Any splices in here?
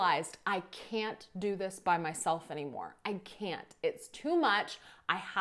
no; 0 cuts

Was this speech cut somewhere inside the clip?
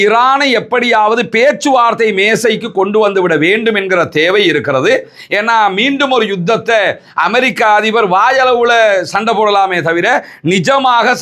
no; 0 cuts

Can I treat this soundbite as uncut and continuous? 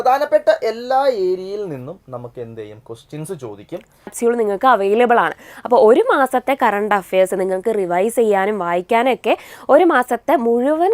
no; 1 cut; at 4.1 s

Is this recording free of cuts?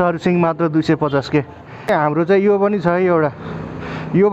no; 1 cut; at 1.9 s

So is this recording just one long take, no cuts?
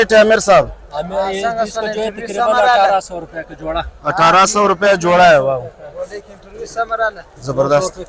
yes; 0 cuts

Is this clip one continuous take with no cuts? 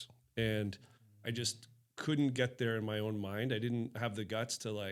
yes; 0 cuts

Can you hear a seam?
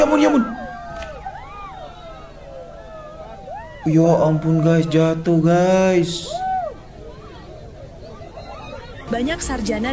yes; 1 cut; at 8.9 s

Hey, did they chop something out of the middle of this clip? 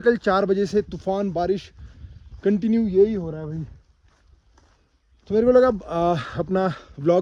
no; 0 cuts

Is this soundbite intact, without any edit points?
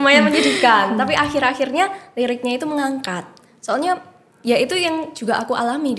yes; 0 cuts

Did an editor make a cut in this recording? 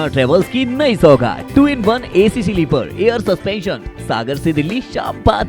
no; 0 cuts

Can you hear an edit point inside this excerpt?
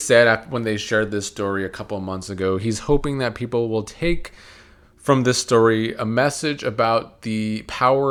no; 0 cuts

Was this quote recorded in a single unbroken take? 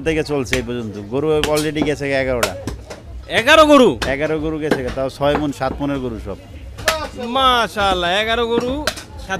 yes; 0 cuts

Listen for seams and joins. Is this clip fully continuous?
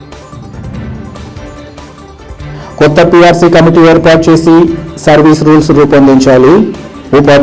no; 1 cut; at 1.9 s

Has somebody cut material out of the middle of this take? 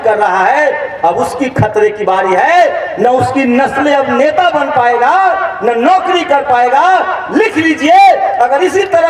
no; 0 cuts

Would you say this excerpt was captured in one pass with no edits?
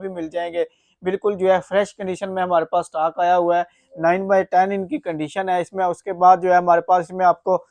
yes; 0 cuts

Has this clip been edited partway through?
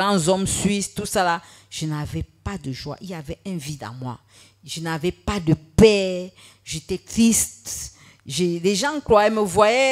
no; 0 cuts

